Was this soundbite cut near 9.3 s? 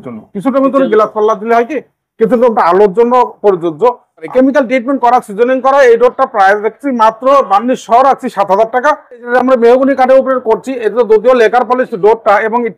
yes; 2 cuts; at 4.3 s, 9.3 s

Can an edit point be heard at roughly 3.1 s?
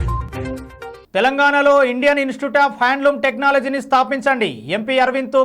no; 1 cut; at 1.0 s

